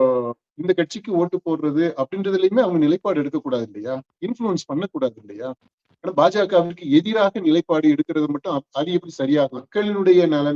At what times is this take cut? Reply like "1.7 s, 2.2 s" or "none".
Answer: 9.6 s